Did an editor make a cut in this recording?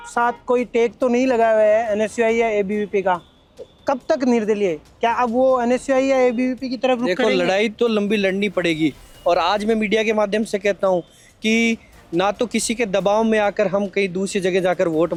no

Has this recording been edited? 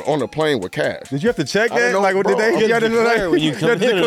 yes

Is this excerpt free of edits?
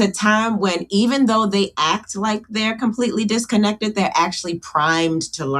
yes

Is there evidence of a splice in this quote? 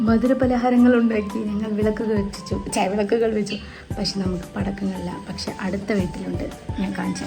no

